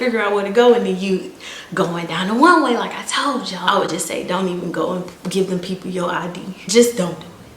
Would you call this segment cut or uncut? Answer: cut